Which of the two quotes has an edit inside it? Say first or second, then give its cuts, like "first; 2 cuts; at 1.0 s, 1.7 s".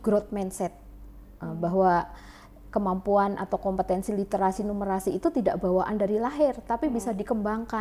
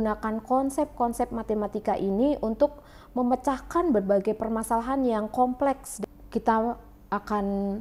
second; 1 cut; at 5.9 s